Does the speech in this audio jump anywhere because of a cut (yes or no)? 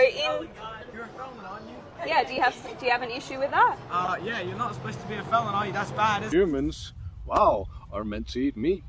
yes